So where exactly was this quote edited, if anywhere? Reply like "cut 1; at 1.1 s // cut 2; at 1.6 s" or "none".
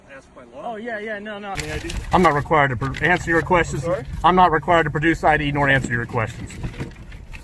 cut 1; at 1.6 s